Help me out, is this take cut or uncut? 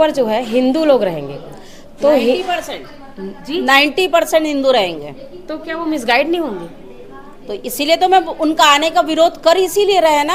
uncut